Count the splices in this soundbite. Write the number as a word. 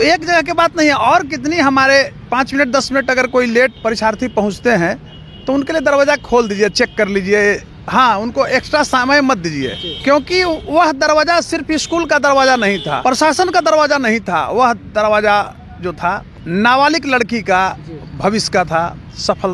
five